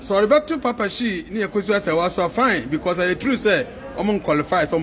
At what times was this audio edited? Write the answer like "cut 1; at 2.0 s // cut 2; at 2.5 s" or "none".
none

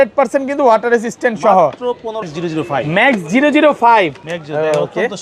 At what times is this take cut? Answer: cut 1; at 2.5 s

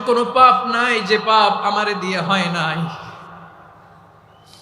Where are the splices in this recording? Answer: none

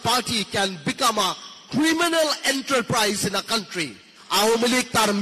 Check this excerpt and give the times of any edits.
cut 1; at 4.1 s

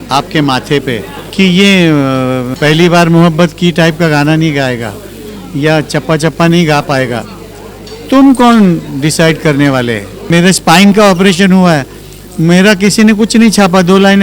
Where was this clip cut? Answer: cut 1; at 1.2 s // cut 2; at 2.5 s // cut 3; at 10.3 s

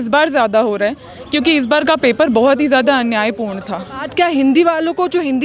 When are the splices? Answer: cut 1; at 4.1 s

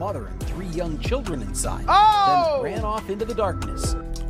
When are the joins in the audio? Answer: none

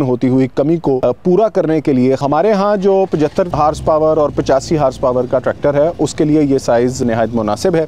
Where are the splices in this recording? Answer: cut 1; at 1.0 s // cut 2; at 2.2 s // cut 3; at 3.5 s // cut 4; at 7.0 s

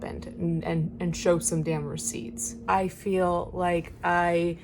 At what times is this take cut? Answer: cut 1; at 2.7 s

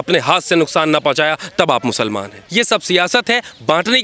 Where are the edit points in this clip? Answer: cut 1; at 2.4 s

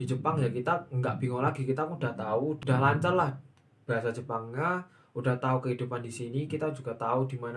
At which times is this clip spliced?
cut 1; at 2.6 s

